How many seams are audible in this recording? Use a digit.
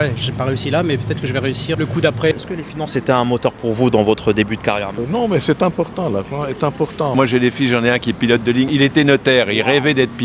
3